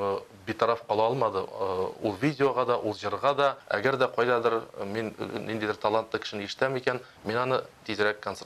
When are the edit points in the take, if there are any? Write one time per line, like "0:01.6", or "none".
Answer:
0:03.6